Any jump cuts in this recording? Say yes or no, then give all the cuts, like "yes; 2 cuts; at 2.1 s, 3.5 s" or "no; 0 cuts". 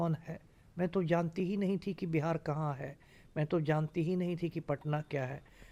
no; 0 cuts